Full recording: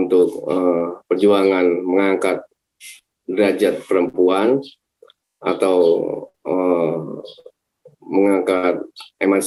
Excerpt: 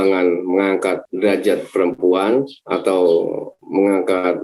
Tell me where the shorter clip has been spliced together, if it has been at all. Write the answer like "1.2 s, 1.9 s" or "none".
1.1 s, 2.6 s, 3.5 s